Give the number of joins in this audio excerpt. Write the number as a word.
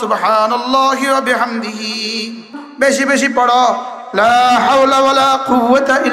one